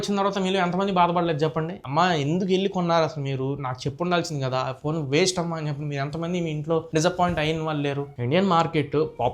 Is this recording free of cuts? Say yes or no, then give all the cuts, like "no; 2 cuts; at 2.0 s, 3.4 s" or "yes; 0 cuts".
no; 1 cut; at 8.1 s